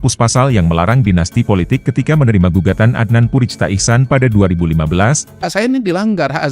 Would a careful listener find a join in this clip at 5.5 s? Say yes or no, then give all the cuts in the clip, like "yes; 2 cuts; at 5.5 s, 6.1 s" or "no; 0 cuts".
yes; 1 cut; at 5.5 s